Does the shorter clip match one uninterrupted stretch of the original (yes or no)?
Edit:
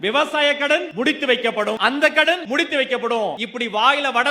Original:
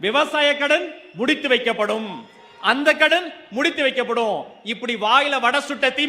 no